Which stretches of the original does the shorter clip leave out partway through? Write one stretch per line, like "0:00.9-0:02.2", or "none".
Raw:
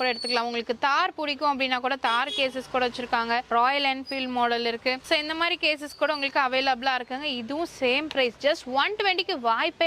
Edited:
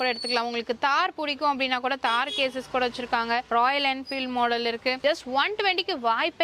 0:05.0-0:08.4

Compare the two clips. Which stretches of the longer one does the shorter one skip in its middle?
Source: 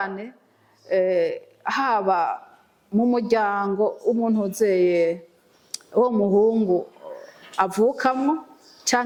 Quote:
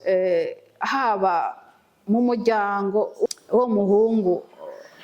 0:04.1-0:05.7

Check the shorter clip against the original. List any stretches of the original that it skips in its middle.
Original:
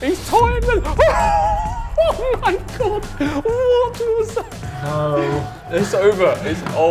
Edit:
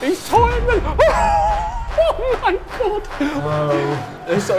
0:03.4-0:04.8

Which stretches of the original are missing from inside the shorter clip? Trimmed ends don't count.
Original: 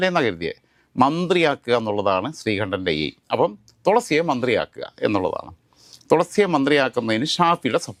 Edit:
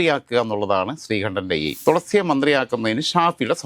0:03.1-0:06.0

